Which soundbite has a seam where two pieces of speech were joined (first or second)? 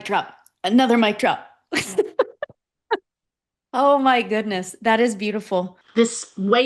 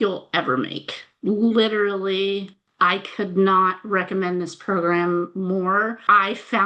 first